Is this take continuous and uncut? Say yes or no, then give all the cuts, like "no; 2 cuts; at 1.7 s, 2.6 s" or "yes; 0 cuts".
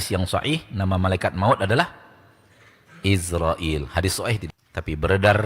no; 1 cut; at 4.4 s